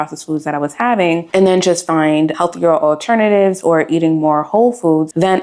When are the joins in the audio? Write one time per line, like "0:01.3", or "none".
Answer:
0:01.2
0:02.3